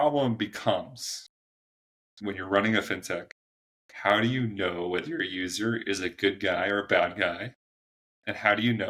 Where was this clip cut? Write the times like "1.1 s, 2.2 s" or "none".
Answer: none